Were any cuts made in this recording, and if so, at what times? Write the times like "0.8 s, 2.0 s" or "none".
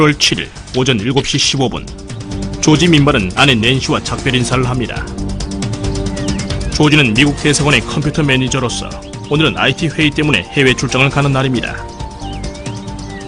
1.4 s